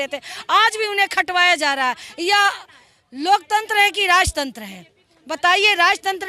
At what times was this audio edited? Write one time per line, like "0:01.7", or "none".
none